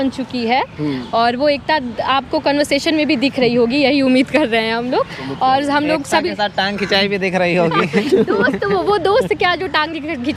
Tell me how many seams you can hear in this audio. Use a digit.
0